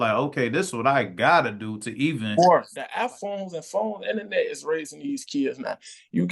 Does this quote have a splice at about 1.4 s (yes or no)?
no